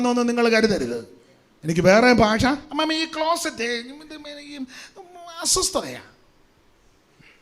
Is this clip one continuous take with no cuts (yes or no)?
no